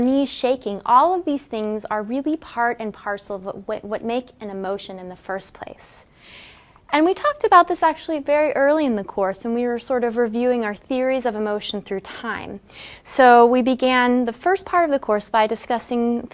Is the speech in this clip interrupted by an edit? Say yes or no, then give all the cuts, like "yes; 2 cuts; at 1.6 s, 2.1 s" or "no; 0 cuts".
yes; 1 cut; at 13.9 s